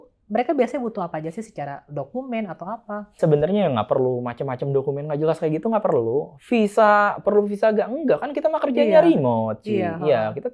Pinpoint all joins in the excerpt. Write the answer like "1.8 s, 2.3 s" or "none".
3.2 s